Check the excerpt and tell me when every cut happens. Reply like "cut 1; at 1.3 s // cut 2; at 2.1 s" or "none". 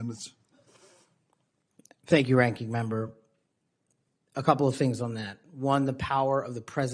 none